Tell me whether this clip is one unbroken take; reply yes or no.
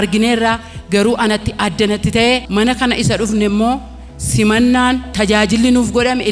yes